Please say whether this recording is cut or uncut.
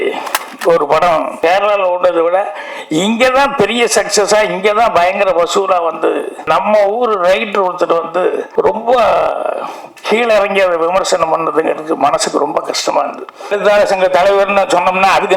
cut